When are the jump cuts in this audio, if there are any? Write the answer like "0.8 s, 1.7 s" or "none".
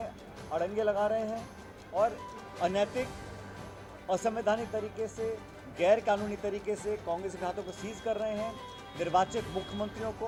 none

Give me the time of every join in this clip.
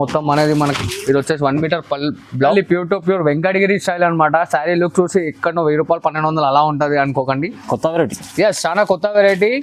2.5 s

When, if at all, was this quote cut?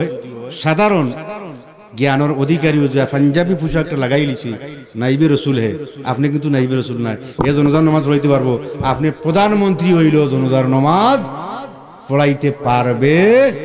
none

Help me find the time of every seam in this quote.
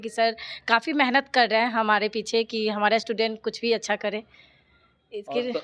none

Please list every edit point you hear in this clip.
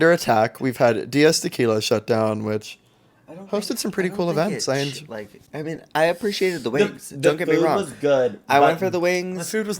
5.4 s

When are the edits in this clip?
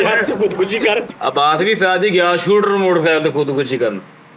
1.1 s

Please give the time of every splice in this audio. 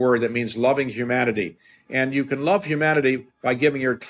none

